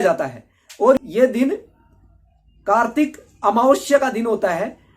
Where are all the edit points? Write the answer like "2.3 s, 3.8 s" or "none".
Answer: 1.0 s